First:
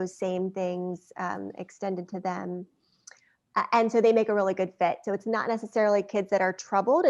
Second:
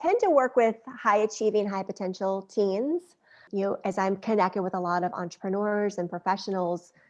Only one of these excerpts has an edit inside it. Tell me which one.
second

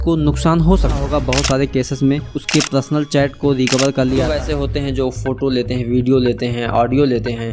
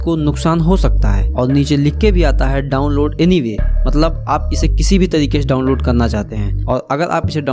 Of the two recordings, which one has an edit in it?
first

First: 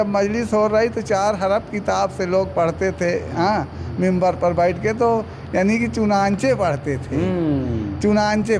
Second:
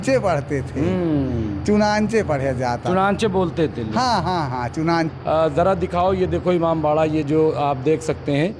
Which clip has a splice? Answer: second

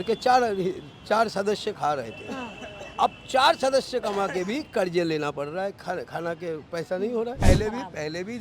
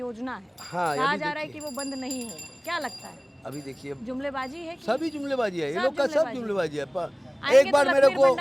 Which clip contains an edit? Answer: first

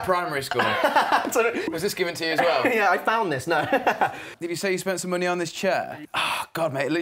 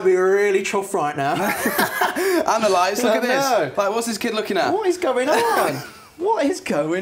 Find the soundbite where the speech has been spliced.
first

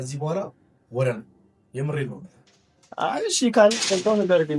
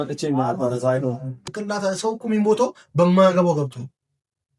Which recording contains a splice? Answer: second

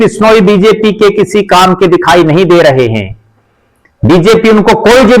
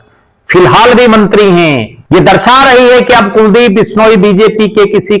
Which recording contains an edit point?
second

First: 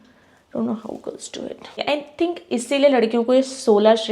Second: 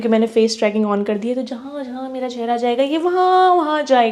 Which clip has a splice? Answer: first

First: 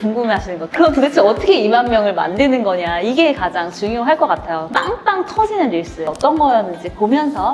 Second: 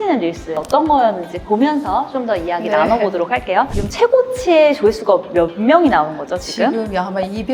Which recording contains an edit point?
second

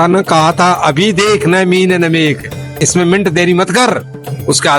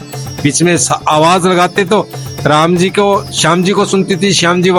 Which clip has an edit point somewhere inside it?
first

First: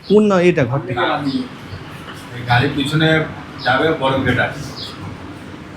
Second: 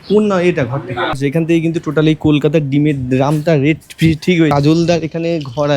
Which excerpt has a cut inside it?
second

